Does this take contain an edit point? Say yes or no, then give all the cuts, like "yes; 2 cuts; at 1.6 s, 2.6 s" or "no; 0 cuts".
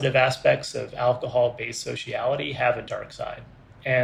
no; 0 cuts